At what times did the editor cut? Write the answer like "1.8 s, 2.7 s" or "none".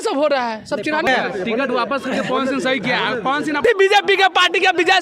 1.1 s, 3.6 s